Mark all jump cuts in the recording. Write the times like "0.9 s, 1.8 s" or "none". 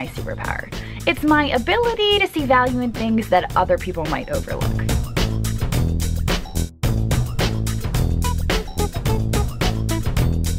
none